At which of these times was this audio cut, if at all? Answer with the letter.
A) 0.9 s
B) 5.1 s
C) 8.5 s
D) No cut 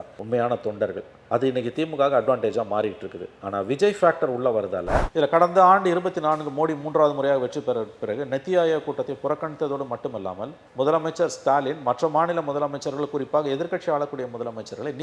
B